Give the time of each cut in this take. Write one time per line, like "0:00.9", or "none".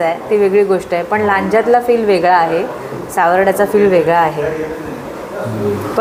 none